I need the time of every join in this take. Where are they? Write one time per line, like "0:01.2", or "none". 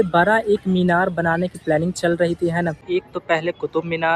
0:02.8